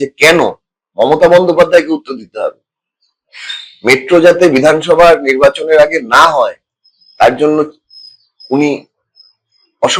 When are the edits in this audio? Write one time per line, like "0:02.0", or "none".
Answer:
none